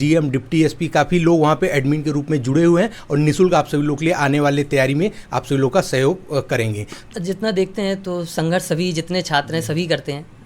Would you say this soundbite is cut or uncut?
cut